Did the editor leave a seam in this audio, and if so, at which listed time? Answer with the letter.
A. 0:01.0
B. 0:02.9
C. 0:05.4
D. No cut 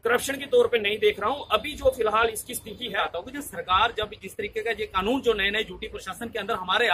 B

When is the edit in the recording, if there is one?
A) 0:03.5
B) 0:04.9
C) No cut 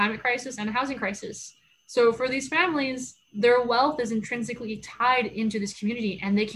C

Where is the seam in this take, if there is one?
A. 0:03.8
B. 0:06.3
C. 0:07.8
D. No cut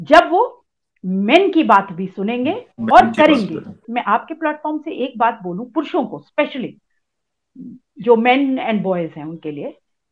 A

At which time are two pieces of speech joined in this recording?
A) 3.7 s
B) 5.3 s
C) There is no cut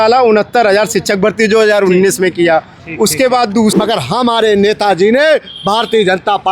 A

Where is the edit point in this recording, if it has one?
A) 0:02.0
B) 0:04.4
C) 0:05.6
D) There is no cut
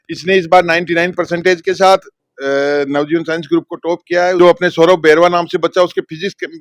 B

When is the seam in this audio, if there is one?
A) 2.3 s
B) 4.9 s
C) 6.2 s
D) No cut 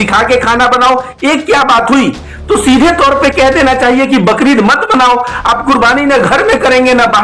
A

